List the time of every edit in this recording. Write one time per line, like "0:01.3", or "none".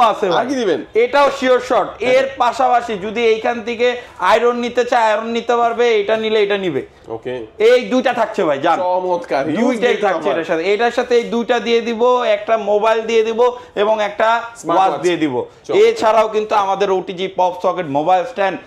none